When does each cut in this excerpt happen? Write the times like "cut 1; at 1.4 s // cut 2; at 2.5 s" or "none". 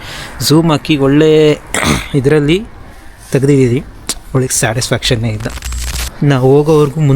cut 1; at 6.0 s

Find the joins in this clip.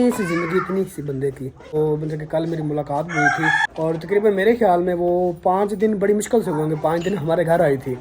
cut 1; at 1.8 s // cut 2; at 3.6 s

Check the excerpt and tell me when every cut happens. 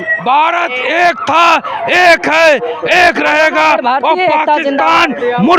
none

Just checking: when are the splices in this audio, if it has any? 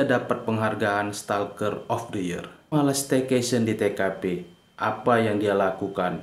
cut 1; at 2.7 s

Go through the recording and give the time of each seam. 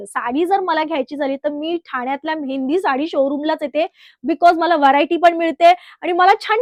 none

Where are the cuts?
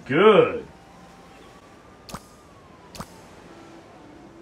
none

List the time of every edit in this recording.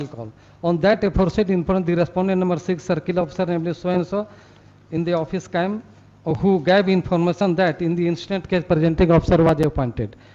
none

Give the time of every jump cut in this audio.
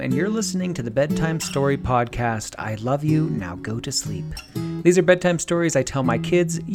none

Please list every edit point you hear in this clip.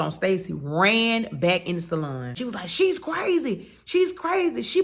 cut 1; at 2.4 s

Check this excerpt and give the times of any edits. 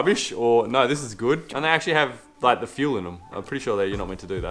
cut 1; at 1.5 s

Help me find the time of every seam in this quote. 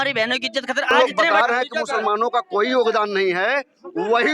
cut 1; at 0.9 s

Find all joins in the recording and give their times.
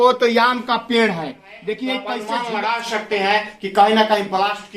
cut 1; at 2.1 s

